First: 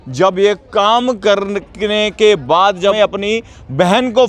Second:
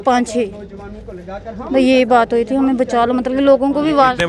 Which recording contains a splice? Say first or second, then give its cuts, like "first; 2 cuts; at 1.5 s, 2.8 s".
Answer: first; 1 cut; at 2.9 s